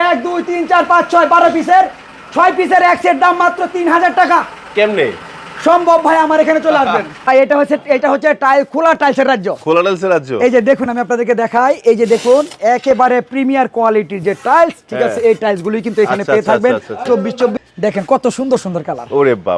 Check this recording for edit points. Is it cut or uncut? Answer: cut